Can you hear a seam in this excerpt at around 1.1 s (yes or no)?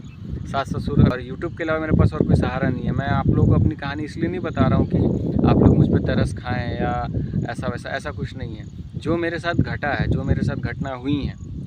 yes